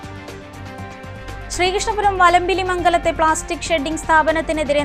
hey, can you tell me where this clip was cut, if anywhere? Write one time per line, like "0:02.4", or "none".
0:01.2